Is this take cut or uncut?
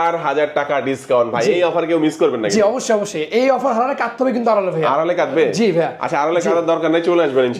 uncut